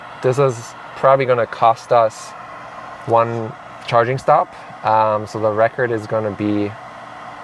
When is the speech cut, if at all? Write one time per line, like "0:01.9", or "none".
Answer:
none